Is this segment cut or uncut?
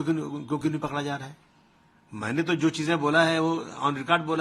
uncut